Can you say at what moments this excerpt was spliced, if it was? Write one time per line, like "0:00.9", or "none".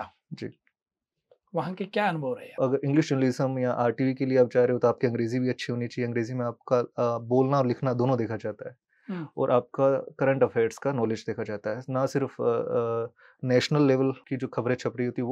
0:02.5